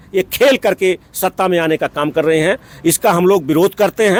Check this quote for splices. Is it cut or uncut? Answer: uncut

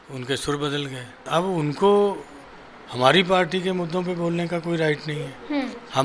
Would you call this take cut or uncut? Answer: cut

